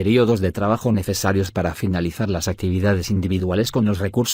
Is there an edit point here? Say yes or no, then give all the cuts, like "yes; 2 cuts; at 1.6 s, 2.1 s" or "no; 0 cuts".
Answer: no; 0 cuts